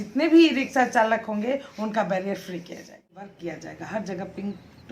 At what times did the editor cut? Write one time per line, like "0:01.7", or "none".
0:03.3